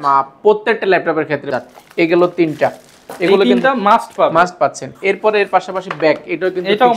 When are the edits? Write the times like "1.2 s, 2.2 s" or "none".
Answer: 1.5 s